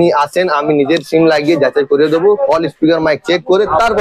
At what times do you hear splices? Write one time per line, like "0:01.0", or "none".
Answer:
none